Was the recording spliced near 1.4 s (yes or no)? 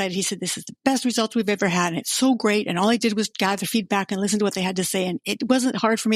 no